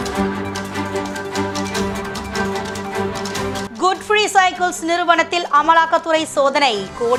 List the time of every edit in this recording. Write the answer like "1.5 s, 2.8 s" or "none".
none